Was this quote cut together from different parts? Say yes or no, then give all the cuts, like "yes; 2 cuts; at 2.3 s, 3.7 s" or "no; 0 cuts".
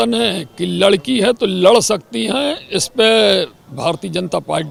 no; 0 cuts